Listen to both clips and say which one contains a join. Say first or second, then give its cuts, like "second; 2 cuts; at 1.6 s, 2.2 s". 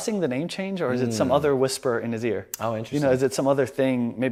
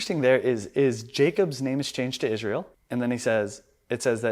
second; 1 cut; at 2.8 s